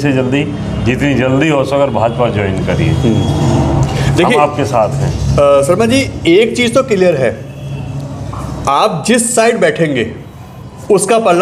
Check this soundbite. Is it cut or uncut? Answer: uncut